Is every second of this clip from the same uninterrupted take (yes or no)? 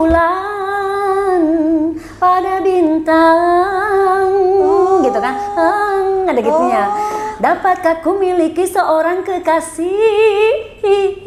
yes